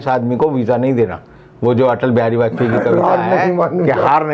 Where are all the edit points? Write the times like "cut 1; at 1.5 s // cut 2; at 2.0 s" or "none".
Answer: cut 1; at 1.2 s